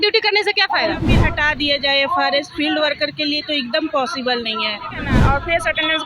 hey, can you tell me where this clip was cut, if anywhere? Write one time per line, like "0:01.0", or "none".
0:01.1
0:05.1